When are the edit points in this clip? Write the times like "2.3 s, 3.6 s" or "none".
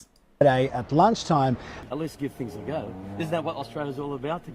1.7 s